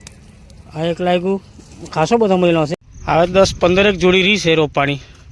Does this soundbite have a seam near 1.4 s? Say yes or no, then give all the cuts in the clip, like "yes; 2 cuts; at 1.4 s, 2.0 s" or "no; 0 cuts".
no; 1 cut; at 2.8 s